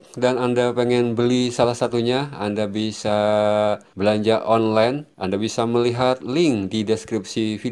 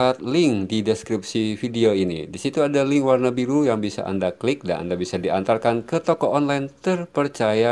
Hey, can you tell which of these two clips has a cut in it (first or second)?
first